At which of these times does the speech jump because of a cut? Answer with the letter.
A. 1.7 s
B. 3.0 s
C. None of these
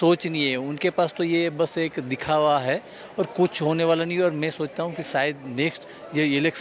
C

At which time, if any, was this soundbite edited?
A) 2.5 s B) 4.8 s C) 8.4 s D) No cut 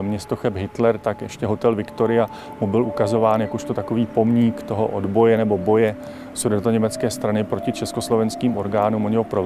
D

